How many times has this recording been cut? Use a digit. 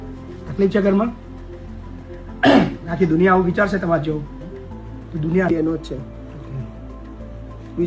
1